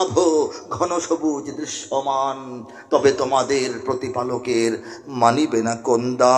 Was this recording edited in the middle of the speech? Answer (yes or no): no